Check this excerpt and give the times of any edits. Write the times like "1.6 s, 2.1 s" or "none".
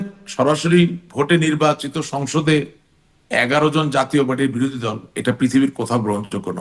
none